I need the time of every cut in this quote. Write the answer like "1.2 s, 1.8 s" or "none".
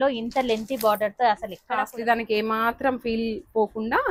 1.6 s